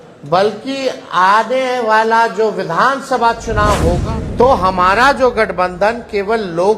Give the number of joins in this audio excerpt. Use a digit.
1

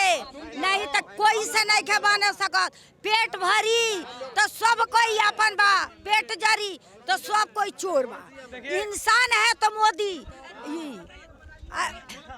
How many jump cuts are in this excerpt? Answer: 0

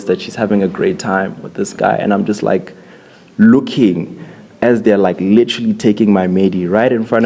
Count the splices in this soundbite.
0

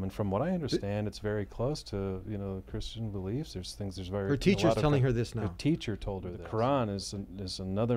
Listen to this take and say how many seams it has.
1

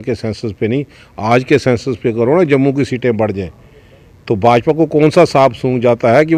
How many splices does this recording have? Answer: 0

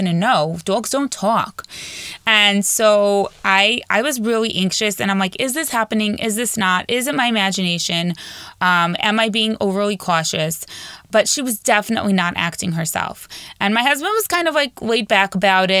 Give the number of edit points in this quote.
0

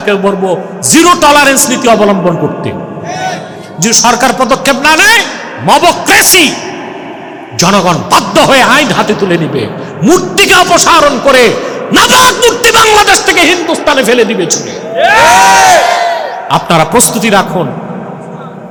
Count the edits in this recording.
0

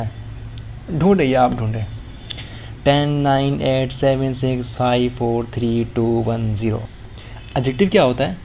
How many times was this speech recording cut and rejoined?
1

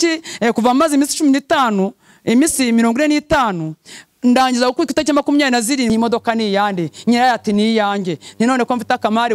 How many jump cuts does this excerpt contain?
1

